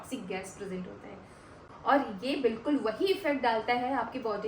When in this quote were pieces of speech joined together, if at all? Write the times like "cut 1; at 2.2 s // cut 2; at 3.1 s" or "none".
cut 1; at 1.5 s